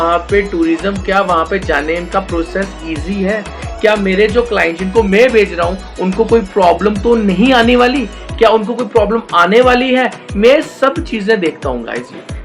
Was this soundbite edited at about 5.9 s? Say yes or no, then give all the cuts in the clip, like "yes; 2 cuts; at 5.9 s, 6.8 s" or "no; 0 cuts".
no; 0 cuts